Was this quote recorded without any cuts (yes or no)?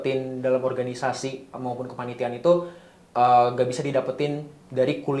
yes